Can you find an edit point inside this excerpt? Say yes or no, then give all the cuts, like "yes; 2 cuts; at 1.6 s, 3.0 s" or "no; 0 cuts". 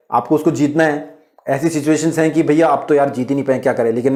no; 0 cuts